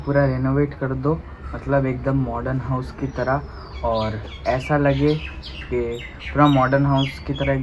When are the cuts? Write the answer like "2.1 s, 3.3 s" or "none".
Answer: none